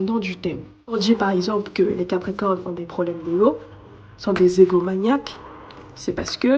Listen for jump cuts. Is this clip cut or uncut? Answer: cut